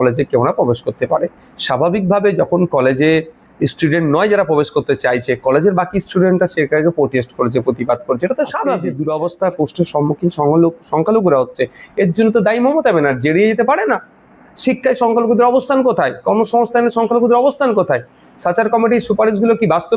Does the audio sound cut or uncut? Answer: cut